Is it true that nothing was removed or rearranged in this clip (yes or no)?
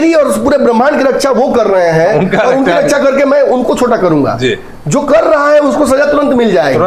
yes